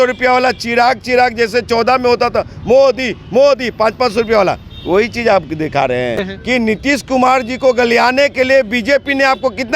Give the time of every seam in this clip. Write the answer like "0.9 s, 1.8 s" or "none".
6.3 s